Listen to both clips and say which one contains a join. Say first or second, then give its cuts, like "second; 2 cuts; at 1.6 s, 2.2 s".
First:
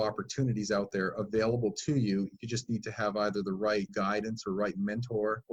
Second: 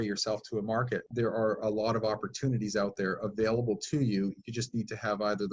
second; 1 cut; at 1.1 s